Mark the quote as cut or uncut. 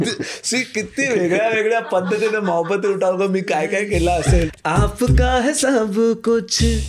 cut